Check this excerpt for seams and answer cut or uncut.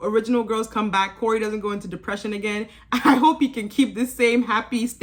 uncut